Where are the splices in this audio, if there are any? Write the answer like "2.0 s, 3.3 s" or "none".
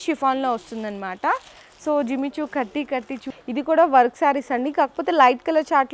3.3 s